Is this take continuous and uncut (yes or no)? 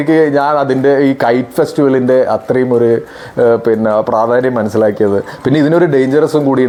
yes